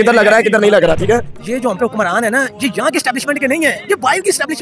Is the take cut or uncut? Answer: cut